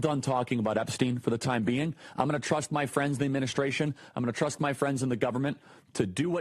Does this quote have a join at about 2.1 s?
no; 0 cuts

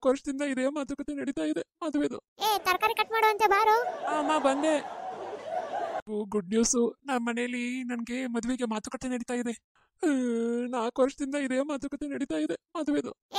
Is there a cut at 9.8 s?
no; 1 cut; at 6.1 s

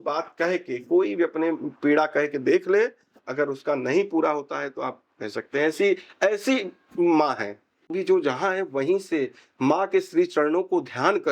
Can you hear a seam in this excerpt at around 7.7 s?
yes; 1 cut; at 7.7 s

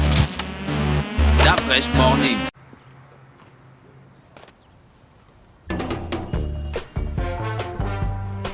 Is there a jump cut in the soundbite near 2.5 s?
yes; 1 cut; at 2.5 s

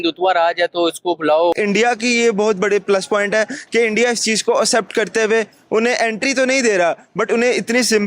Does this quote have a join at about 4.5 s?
no; 1 cut; at 1.5 s

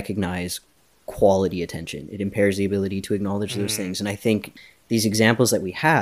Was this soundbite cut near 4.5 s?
yes; 1 cut; at 4.5 s

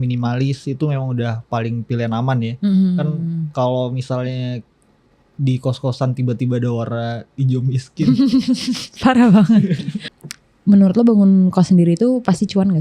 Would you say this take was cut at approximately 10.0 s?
yes; 1 cut; at 10.0 s

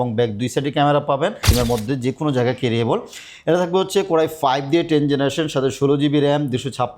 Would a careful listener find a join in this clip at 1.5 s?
yes; 1 cut; at 1.5 s

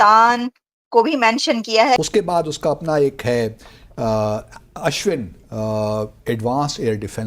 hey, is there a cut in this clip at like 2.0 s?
yes; 1 cut; at 2.0 s

